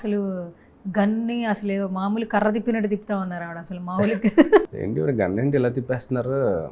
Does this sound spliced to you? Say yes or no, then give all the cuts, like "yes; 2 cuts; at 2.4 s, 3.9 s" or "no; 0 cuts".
yes; 1 cut; at 4.6 s